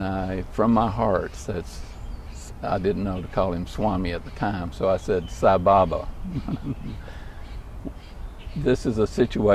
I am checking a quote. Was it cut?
no; 0 cuts

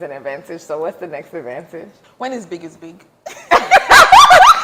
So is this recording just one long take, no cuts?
no; 1 cut; at 2.0 s

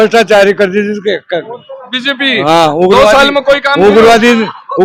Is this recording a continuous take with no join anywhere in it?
yes; 0 cuts

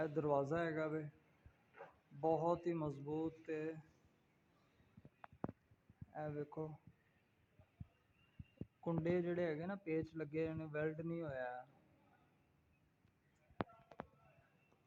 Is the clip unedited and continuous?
yes; 0 cuts

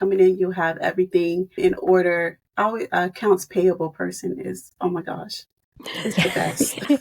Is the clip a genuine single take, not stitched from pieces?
no; 2 cuts; at 1.6 s, 2.4 s

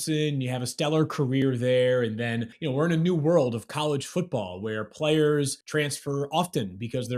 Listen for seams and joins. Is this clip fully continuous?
no; 2 cuts; at 2.5 s, 5.6 s

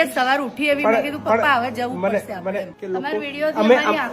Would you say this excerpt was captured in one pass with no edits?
no; 1 cut; at 2.7 s

